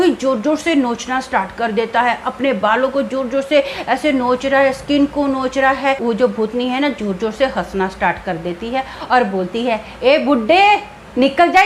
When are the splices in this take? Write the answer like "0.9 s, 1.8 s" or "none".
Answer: 6.0 s